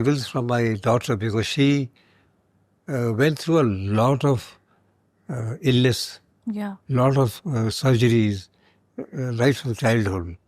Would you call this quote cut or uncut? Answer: uncut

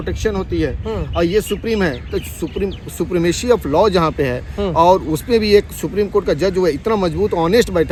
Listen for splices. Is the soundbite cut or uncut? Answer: uncut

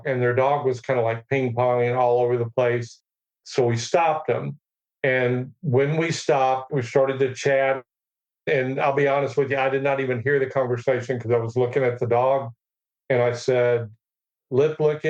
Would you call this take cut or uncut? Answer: cut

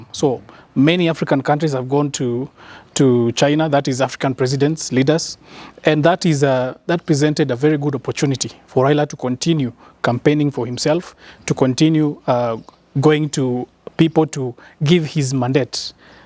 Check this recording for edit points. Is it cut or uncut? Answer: uncut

